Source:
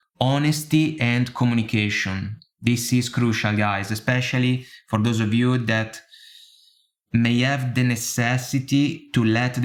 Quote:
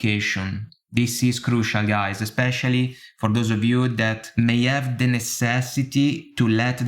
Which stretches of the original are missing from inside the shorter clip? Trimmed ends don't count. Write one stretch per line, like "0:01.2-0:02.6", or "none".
0:05.9-0:07.0